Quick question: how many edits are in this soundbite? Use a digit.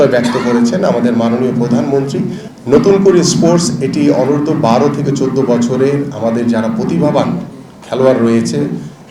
1